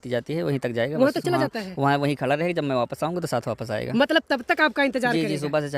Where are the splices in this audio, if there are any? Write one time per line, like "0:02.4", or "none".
none